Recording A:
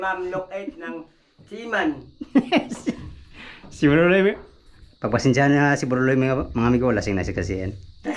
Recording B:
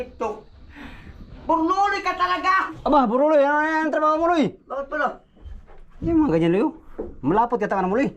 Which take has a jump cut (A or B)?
B